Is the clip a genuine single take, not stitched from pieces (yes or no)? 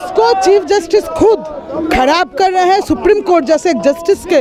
yes